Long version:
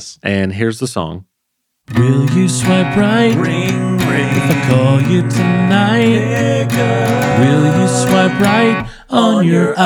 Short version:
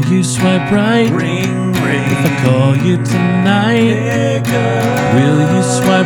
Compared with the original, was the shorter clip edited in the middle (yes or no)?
no